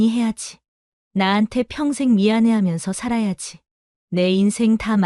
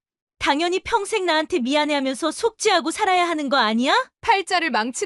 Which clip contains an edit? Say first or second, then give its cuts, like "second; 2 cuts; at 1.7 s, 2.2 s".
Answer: second; 1 cut; at 4.1 s